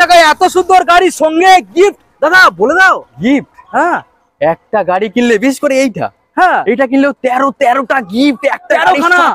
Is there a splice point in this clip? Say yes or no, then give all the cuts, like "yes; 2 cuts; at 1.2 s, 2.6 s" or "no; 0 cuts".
no; 0 cuts